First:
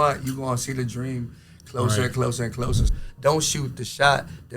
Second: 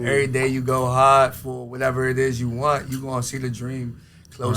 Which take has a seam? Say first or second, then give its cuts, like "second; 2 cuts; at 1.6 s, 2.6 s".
first; 1 cut; at 2.9 s